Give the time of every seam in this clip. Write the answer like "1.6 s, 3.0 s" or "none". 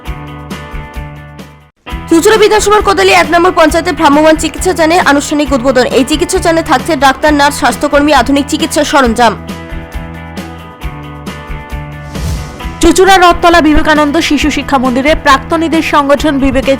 1.4 s